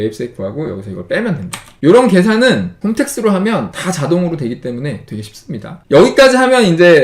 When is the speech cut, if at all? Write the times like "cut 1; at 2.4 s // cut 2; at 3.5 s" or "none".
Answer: none